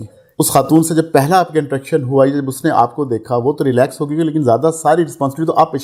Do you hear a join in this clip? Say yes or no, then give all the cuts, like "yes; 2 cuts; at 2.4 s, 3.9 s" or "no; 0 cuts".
no; 0 cuts